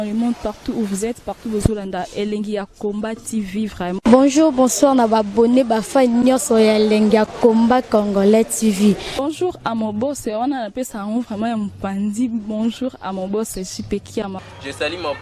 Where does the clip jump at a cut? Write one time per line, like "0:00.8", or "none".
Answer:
none